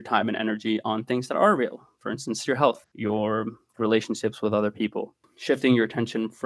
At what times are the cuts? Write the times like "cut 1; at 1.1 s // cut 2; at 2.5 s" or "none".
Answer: cut 1; at 2.9 s // cut 2; at 5.3 s